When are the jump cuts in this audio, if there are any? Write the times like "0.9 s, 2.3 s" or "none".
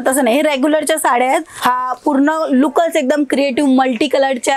1.5 s